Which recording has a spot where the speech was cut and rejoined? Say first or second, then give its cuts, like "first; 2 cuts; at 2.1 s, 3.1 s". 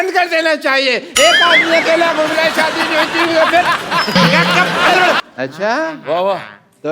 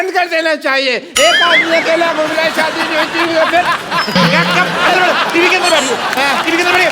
first; 1 cut; at 5.2 s